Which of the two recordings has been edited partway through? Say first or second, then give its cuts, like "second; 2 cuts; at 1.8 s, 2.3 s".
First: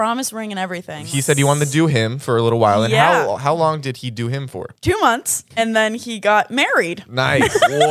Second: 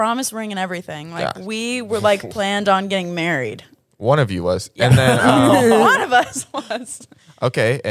first; 3 cuts; at 1.1 s, 4.7 s, 5.4 s